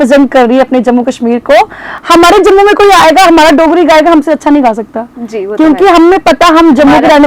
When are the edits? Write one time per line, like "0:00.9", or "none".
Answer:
0:01.9

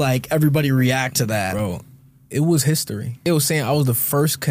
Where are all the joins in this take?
0:03.2

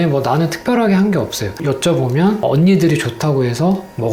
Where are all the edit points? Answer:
0:01.5

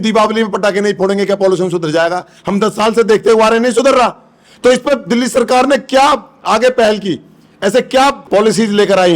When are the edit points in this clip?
0:08.2

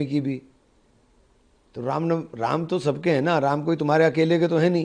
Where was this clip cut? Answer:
none

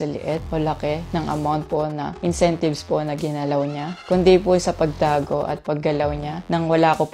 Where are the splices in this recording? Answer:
none

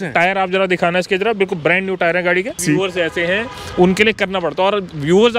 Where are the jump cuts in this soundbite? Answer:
0:02.6

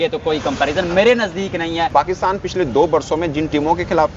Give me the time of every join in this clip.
0:01.9

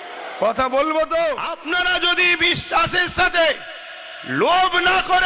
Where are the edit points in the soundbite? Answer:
0:01.6

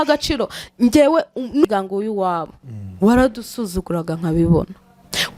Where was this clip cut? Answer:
0:01.7

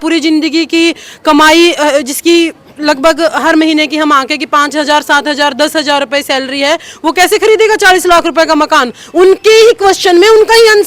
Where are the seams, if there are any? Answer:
none

